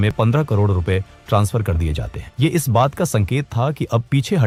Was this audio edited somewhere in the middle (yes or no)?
no